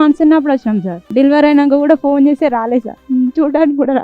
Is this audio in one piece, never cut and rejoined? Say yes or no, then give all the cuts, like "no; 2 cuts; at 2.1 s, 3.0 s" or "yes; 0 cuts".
no; 2 cuts; at 1.0 s, 3.0 s